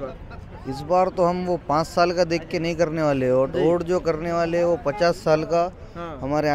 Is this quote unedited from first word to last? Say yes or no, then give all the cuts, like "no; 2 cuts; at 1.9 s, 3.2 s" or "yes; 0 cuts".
yes; 0 cuts